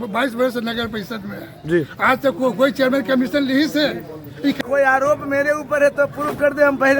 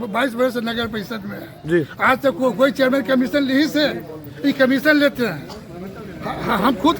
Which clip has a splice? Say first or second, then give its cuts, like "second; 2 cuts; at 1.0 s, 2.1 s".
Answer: first; 1 cut; at 4.6 s